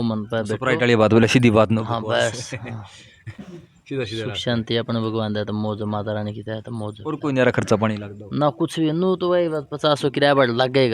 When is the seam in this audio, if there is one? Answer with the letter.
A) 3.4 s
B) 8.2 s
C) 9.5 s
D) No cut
D